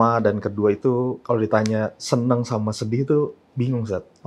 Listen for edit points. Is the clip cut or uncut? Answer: cut